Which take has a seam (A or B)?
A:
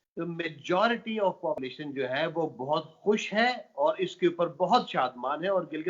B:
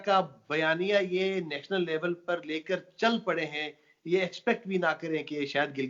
A